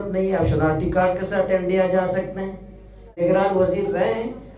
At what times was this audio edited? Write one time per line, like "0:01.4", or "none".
0:03.1